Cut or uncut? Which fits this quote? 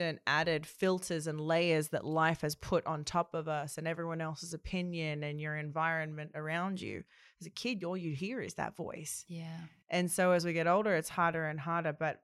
uncut